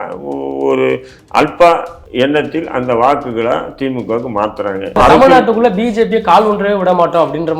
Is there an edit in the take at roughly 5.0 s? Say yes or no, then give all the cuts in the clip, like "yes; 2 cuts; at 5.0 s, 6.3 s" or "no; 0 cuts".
yes; 2 cuts; at 2.0 s, 5.0 s